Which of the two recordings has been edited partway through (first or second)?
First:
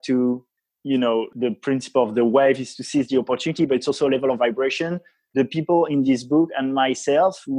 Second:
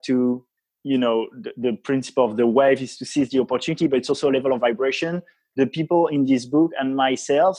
first